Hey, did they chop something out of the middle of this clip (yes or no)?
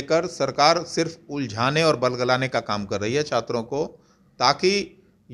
no